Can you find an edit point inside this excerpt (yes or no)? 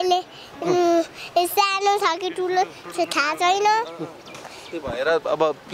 no